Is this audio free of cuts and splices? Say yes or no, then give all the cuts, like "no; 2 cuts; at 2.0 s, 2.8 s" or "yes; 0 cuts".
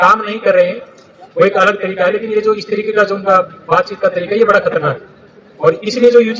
yes; 0 cuts